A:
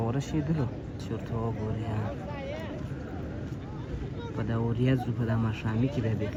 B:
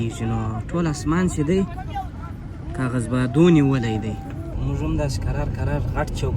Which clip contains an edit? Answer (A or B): B